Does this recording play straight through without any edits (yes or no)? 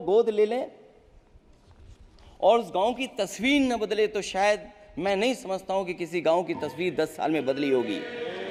yes